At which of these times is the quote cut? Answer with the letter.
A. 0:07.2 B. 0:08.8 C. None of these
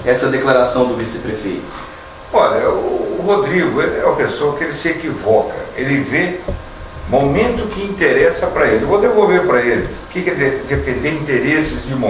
C